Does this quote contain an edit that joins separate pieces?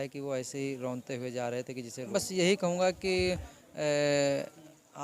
yes; 1 cut; at 2.1 s

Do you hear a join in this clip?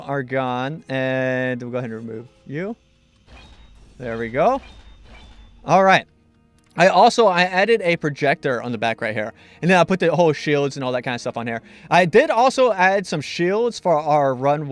yes; 1 cut; at 1.5 s

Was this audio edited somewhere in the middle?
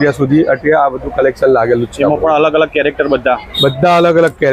no; 0 cuts

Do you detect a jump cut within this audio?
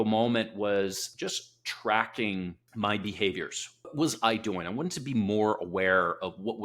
yes; 3 cuts; at 1.0 s, 2.6 s, 3.9 s

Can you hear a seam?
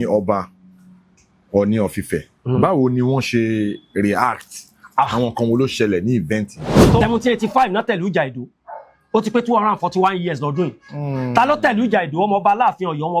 yes; 1 cut; at 7.0 s

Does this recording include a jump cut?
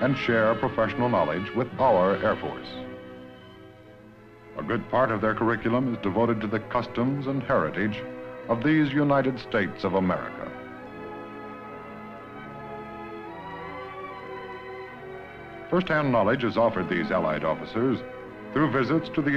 yes; 1 cut; at 15.6 s

